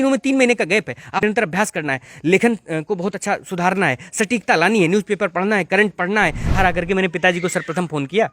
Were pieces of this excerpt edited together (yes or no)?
yes